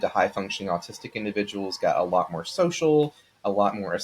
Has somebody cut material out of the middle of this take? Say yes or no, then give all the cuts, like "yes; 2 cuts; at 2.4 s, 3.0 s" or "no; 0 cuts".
no; 0 cuts